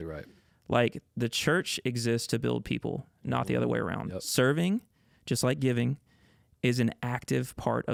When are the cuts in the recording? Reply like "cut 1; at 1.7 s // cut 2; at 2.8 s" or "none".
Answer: none